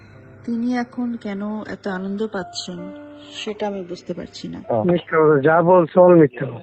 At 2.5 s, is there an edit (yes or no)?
no